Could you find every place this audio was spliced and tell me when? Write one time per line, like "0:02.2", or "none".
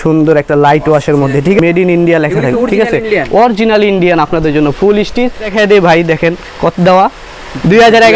0:01.6
0:05.5